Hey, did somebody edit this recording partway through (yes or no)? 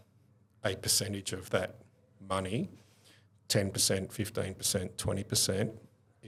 no